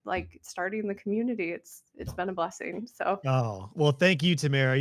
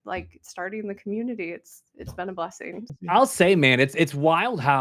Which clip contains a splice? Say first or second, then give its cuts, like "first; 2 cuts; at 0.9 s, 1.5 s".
second; 1 cut; at 2.9 s